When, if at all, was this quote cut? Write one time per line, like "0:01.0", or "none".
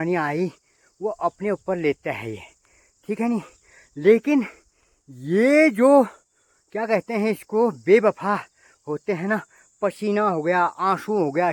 none